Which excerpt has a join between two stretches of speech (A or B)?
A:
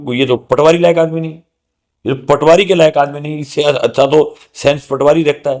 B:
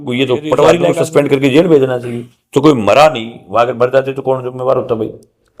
B